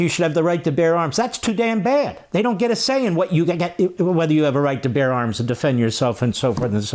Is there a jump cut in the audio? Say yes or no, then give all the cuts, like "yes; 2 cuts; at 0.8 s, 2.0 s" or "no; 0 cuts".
no; 0 cuts